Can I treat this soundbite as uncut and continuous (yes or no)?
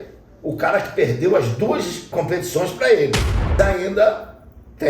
no